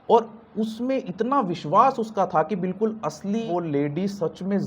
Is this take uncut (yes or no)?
no